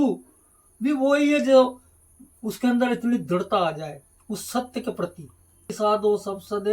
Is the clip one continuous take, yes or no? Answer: no